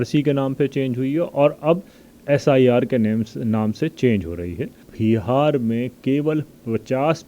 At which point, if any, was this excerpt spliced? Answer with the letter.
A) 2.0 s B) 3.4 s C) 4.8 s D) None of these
C